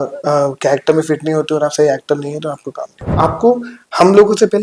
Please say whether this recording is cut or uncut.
cut